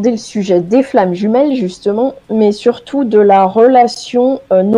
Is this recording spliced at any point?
no; 0 cuts

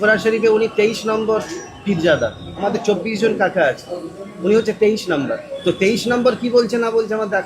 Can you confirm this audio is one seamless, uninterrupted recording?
no; 2 cuts; at 2.5 s, 5.5 s

